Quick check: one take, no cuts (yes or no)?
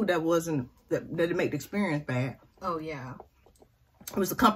yes